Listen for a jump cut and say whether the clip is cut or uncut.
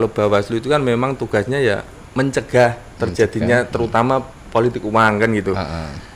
cut